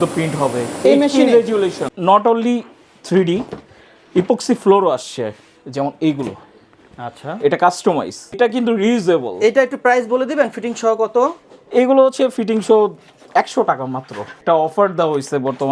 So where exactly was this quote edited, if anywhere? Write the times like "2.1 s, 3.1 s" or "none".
1.9 s, 8.4 s, 14.3 s

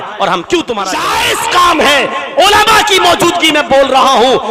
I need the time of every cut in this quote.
1.0 s

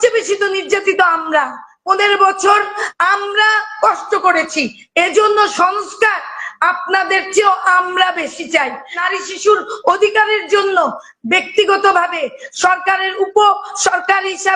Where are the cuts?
9.0 s

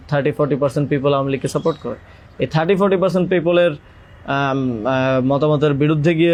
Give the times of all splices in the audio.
none

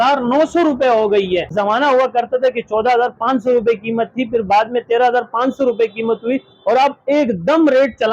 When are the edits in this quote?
1.5 s

